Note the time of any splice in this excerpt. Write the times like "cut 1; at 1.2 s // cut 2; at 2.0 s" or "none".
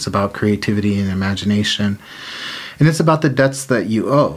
none